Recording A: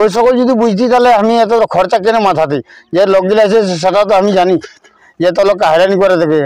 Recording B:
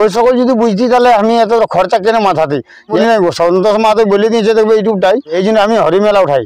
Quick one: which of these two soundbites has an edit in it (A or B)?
B